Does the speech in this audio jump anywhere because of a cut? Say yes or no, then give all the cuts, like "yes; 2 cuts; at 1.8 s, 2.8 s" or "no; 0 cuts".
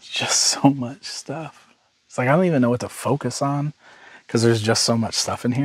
no; 0 cuts